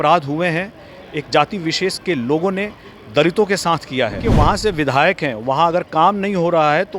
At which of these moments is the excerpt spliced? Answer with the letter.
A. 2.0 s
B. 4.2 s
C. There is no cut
B